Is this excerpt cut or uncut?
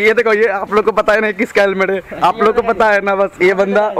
uncut